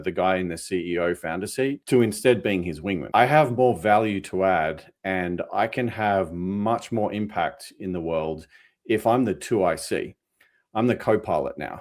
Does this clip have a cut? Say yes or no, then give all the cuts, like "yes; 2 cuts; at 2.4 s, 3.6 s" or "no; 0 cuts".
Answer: yes; 2 cuts; at 1.8 s, 3.0 s